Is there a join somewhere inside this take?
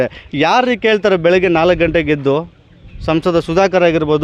no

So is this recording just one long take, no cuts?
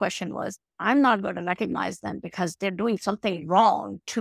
yes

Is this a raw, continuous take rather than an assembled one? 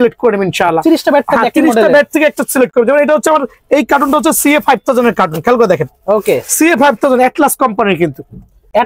yes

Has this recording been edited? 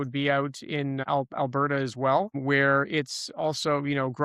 yes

